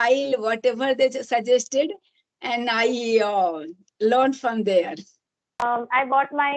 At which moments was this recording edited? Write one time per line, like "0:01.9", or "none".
0:05.6